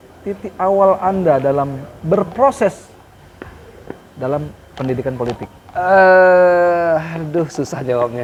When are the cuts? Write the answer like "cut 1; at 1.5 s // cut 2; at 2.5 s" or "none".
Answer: none

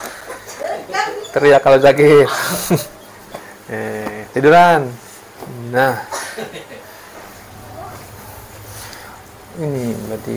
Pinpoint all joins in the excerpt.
cut 1; at 7.1 s

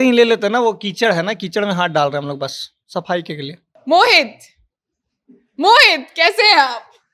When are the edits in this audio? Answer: cut 1; at 3.7 s

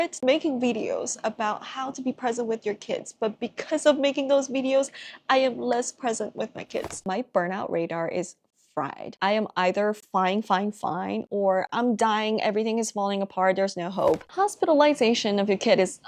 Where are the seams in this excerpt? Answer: cut 1; at 7.0 s // cut 2; at 9.0 s // cut 3; at 14.3 s

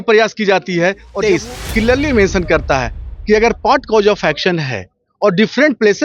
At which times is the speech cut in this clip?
cut 1; at 1.1 s

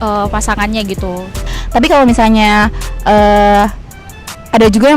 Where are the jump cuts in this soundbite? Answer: cut 1; at 1.5 s

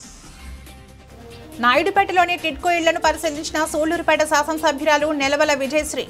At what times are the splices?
cut 1; at 0.9 s

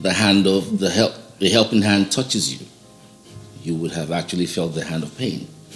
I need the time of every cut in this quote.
none

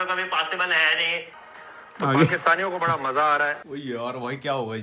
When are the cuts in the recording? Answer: cut 1; at 1.3 s // cut 2; at 3.7 s

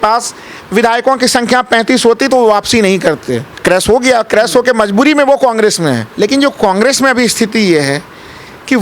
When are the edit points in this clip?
cut 1; at 3.5 s // cut 2; at 6.1 s

